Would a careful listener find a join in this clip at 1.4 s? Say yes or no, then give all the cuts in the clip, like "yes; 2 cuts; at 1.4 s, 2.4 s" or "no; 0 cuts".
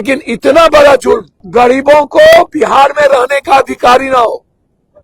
yes; 1 cut; at 1.4 s